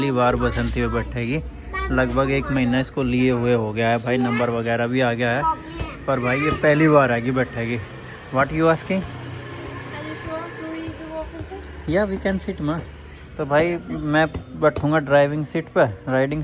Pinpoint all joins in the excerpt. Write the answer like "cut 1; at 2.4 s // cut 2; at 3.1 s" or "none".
none